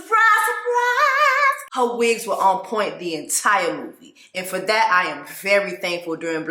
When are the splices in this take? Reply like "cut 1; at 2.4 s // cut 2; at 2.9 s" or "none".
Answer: cut 1; at 1.6 s